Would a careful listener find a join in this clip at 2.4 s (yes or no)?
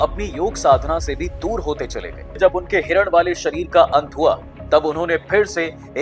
yes